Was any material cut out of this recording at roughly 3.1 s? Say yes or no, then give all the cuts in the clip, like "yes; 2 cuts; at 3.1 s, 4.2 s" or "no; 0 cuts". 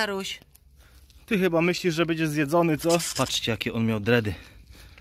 yes; 1 cut; at 3.1 s